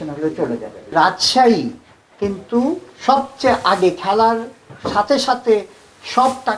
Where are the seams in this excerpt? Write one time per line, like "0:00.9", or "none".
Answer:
0:00.9